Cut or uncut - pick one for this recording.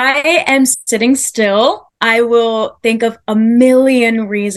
uncut